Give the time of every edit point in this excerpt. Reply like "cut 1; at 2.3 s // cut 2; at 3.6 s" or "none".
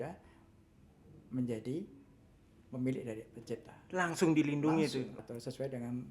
cut 1; at 5.1 s